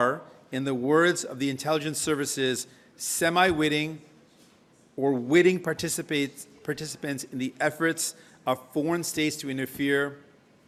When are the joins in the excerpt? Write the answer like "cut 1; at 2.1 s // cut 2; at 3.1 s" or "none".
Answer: none